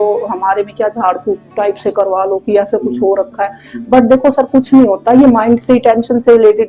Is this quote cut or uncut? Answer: uncut